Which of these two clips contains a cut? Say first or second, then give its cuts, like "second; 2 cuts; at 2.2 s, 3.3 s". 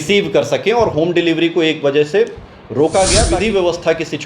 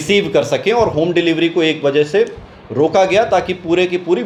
first; 1 cut; at 3.3 s